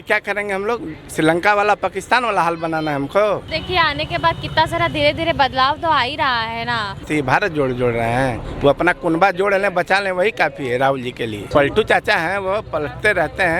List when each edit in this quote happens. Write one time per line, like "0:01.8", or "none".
0:03.5
0:07.1
0:11.4